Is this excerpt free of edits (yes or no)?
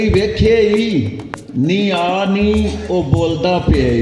yes